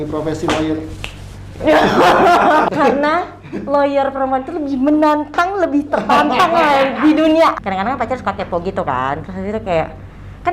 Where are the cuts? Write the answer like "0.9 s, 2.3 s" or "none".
2.7 s, 7.5 s